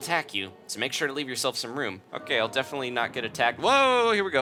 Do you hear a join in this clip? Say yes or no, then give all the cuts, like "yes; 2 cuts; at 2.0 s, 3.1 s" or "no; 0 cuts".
no; 0 cuts